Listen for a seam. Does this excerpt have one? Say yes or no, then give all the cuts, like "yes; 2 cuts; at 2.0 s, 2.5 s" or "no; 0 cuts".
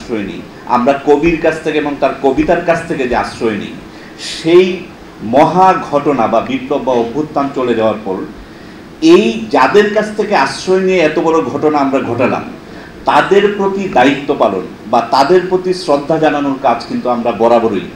no; 0 cuts